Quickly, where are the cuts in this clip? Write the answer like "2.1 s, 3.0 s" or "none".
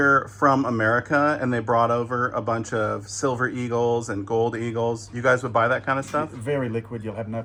none